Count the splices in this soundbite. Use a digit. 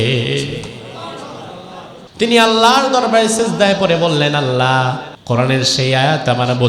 2